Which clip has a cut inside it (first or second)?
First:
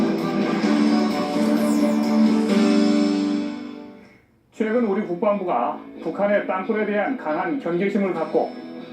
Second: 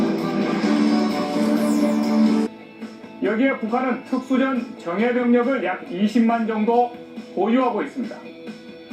first